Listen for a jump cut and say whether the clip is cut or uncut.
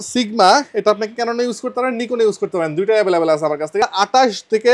cut